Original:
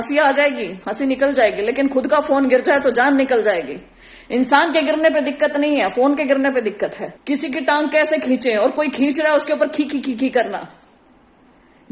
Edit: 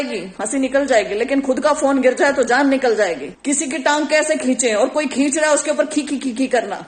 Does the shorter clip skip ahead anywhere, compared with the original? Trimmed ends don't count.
yes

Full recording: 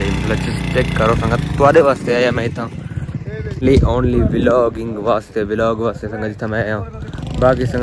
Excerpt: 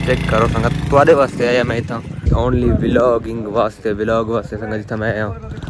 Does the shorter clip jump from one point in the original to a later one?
yes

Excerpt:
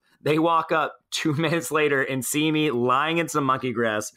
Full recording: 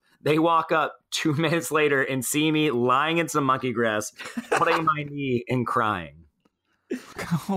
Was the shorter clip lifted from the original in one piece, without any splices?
yes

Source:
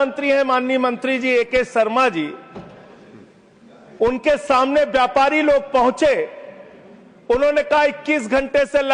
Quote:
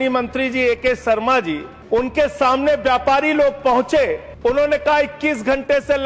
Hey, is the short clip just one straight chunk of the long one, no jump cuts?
no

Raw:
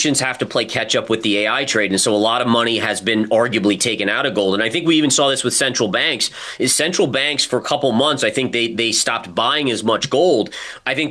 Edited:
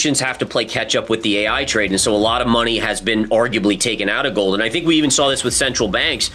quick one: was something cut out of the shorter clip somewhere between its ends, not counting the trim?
no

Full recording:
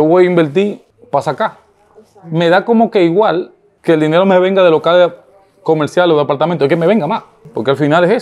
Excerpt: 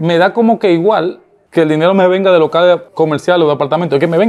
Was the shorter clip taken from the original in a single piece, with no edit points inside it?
no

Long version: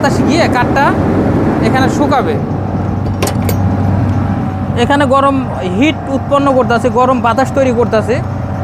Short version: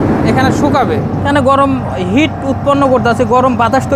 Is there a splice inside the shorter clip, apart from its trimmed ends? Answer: yes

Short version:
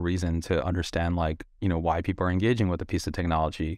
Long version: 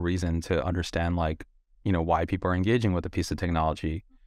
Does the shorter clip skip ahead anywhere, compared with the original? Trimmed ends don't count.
yes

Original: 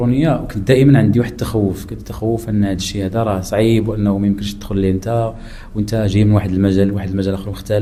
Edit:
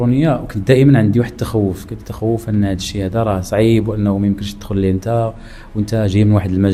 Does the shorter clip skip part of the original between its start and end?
no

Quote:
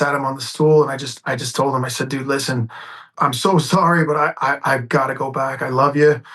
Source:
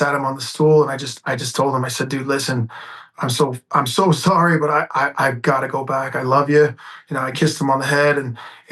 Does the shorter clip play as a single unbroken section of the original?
no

